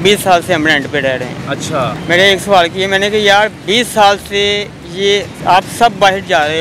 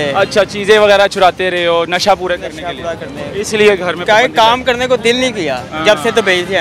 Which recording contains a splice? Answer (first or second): first